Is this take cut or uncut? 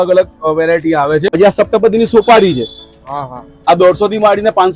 cut